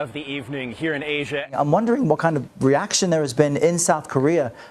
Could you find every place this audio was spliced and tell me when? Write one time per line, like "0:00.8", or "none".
0:01.4